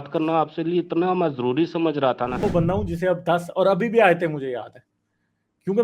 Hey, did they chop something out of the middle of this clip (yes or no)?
yes